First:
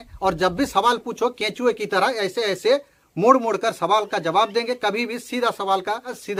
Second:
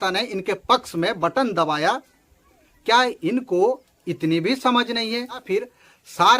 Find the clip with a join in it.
second; 1 cut; at 5.4 s

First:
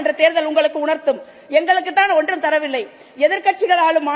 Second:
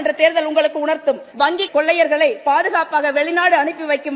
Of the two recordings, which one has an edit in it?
second; 1 cut; at 1.5 s

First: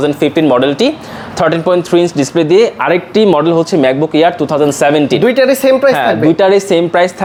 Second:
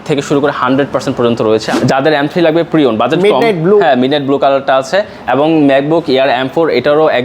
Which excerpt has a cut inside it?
second; 1 cut; at 1.7 s

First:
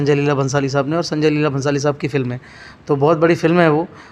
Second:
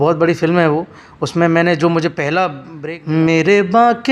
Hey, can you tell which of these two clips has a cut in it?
second; 1 cut; at 2.7 s

